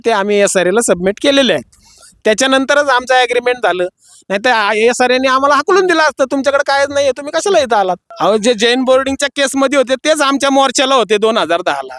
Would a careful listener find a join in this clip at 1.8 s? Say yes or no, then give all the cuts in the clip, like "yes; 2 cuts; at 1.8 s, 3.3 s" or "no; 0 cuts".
no; 1 cut; at 8.1 s